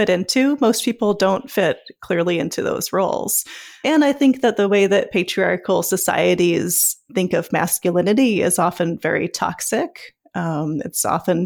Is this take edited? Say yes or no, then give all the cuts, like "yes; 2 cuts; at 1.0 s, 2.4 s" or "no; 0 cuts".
yes; 2 cuts; at 3.8 s, 7.1 s